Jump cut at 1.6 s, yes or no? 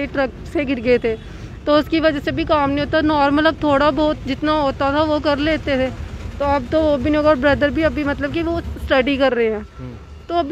no